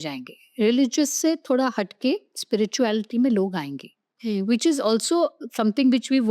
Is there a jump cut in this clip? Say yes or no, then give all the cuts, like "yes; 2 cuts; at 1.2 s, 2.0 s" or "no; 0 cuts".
no; 0 cuts